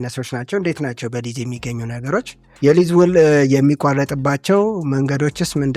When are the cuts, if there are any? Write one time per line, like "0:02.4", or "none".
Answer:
0:02.4